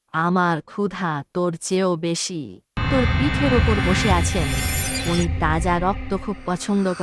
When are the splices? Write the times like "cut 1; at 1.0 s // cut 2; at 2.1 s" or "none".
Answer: cut 1; at 2.8 s